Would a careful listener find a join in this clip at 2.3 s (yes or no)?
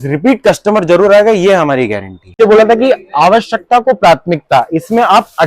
yes